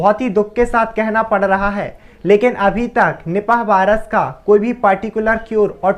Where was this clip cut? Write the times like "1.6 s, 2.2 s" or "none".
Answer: none